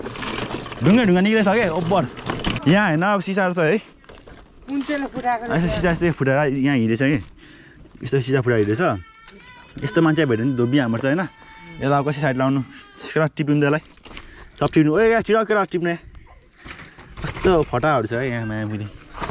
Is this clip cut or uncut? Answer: cut